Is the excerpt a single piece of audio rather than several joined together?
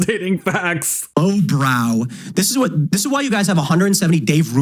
yes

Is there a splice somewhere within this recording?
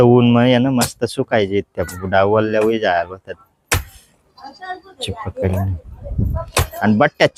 no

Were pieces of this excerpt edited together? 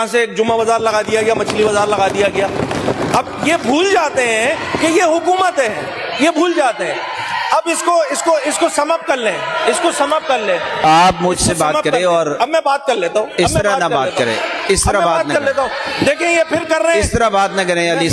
no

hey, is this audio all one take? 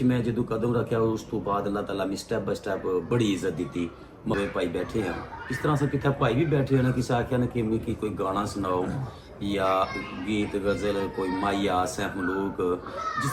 no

